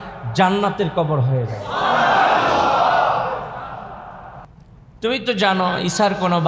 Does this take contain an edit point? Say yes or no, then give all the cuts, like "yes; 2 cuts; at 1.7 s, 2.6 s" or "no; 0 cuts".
yes; 1 cut; at 4.5 s